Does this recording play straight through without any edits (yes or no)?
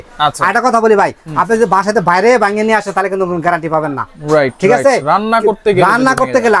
yes